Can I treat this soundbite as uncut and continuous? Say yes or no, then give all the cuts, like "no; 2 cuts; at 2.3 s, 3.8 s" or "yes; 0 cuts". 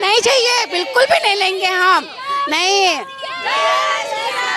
yes; 0 cuts